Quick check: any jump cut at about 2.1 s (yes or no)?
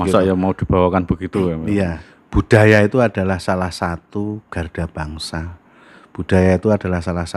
yes